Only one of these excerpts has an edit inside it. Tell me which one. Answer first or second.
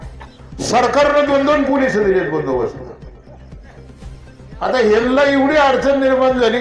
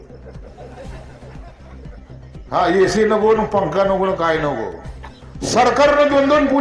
first